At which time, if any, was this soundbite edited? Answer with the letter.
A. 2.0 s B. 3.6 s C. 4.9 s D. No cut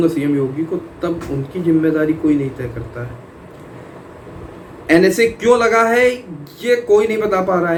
D